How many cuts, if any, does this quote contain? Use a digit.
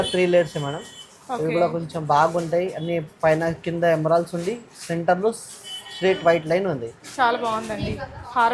0